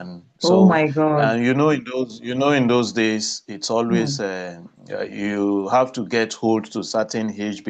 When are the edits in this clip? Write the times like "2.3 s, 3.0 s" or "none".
none